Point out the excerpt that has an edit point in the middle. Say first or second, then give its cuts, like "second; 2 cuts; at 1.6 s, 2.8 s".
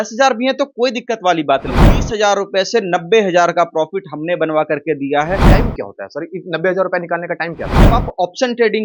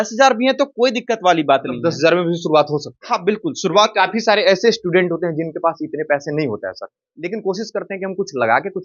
first; 3 cuts; at 1.7 s, 5.4 s, 7.7 s